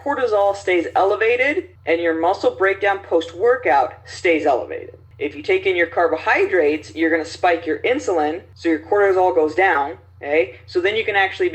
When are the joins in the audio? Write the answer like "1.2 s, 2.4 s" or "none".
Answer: none